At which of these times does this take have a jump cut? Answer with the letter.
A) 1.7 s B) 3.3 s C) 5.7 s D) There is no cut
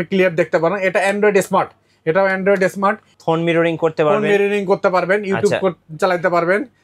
D